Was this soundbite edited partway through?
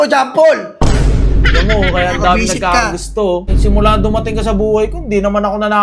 yes; 1 cut; at 3.5 s

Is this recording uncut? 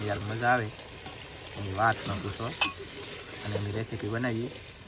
yes; 0 cuts

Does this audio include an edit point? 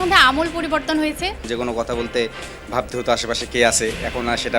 yes; 1 cut; at 1.4 s

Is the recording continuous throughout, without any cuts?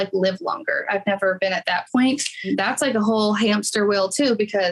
yes; 0 cuts

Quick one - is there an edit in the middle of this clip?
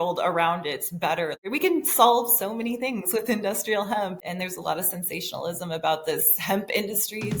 yes; 2 cuts; at 1.5 s, 4.2 s

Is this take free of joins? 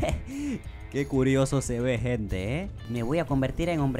no; 1 cut; at 2.9 s

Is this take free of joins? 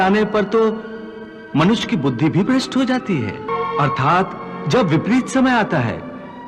no; 1 cut; at 3.5 s

